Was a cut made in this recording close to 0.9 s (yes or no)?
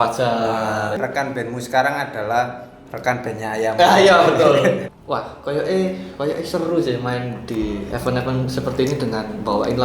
yes